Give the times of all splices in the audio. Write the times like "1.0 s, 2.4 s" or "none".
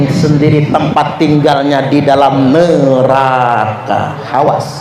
none